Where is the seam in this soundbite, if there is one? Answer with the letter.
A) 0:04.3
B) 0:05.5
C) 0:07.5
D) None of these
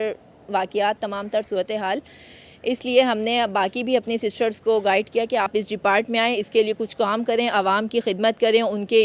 B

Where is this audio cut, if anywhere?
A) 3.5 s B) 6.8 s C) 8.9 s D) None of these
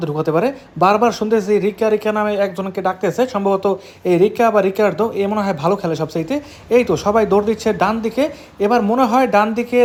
D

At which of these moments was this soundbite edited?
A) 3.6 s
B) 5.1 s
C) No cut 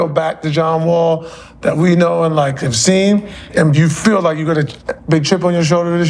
A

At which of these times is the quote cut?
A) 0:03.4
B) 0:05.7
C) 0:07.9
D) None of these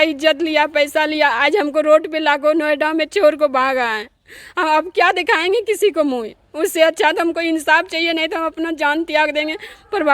D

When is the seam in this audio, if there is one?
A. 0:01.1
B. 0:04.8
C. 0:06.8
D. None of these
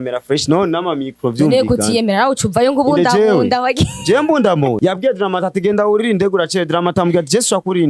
B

